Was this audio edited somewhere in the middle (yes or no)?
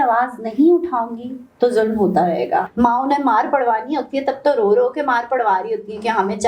yes